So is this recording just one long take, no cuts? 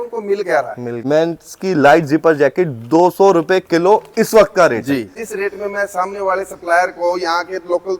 no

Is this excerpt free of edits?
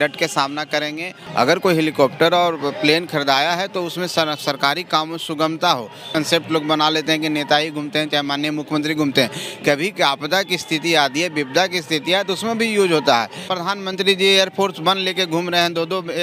no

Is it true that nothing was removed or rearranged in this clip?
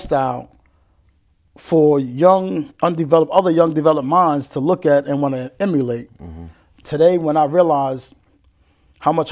yes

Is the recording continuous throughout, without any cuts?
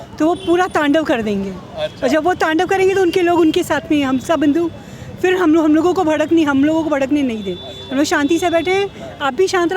yes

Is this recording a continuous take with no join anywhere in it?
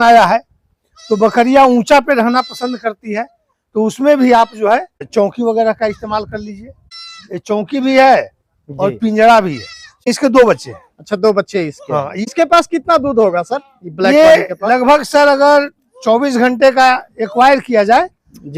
no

